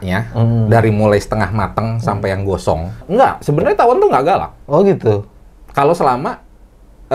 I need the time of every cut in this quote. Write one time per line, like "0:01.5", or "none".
0:03.1